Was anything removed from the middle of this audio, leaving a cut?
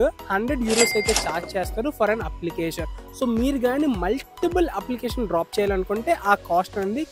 no; 0 cuts

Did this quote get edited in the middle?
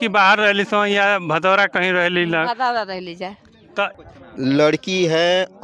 yes; 1 cut; at 3.9 s

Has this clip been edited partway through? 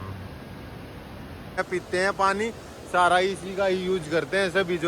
yes; 1 cut; at 1.6 s

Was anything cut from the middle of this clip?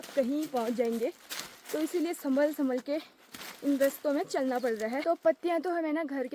yes; 1 cut; at 5.0 s

